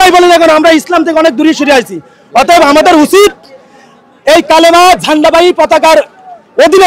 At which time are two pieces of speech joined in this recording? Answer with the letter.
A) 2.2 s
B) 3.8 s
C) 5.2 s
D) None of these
D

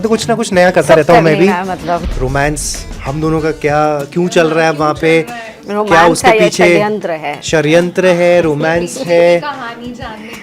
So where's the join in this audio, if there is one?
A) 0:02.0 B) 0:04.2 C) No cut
A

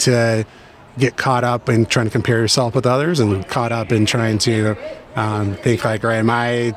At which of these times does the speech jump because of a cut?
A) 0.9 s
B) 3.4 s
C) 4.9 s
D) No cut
D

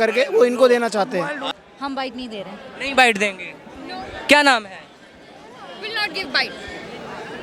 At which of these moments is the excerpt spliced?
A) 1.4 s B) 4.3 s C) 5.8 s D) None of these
A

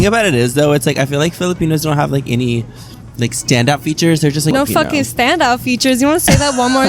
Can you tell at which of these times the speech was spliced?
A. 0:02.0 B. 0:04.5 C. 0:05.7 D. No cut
B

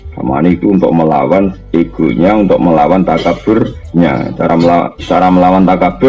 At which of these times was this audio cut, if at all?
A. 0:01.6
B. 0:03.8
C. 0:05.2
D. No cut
B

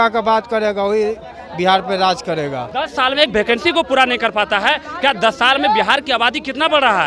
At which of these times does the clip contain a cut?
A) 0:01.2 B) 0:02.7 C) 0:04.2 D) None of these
B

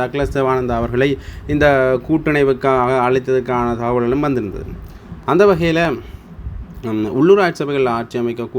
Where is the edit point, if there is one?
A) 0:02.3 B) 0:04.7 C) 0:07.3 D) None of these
D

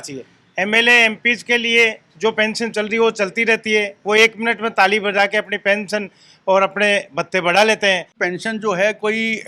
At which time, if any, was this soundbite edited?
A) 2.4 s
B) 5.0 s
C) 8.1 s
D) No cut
C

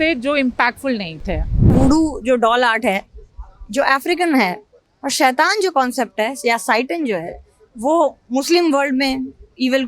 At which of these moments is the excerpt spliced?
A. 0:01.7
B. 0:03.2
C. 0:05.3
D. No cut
A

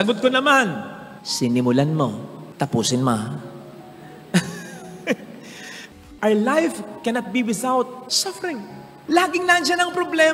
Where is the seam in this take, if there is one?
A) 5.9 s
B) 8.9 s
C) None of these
A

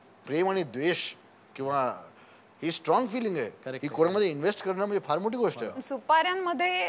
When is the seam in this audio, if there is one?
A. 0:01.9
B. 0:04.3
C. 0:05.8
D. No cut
C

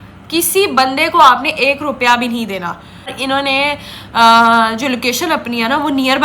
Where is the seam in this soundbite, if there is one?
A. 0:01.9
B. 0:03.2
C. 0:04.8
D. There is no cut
B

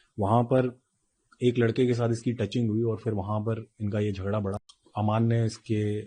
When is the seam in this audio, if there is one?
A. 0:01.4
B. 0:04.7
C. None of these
B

